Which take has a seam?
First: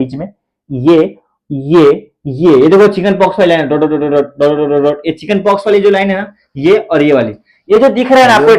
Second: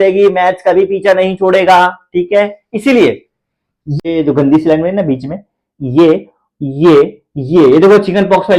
second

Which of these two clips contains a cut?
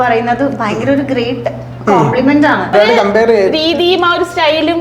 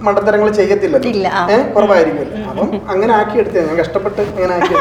first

